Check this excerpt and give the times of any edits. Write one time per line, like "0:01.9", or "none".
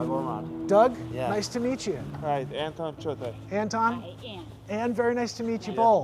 0:02.1